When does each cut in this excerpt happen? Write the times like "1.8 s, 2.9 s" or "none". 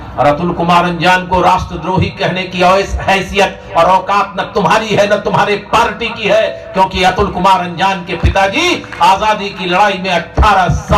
none